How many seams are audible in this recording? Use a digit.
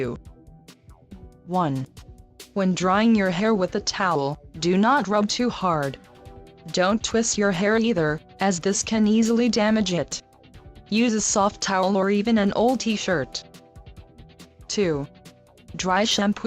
1